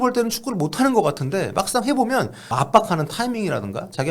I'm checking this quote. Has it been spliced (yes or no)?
yes